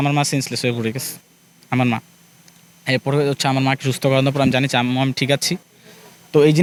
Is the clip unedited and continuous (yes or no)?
yes